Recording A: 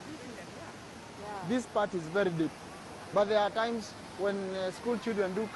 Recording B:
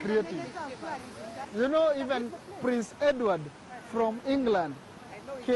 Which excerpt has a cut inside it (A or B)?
B